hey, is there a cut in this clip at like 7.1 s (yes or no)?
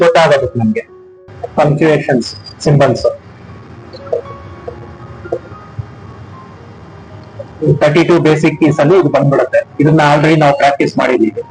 no